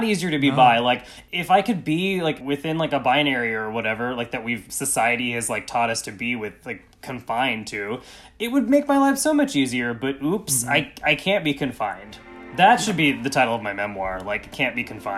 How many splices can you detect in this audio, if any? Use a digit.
3